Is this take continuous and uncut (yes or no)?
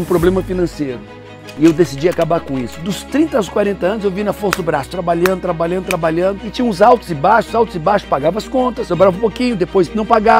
no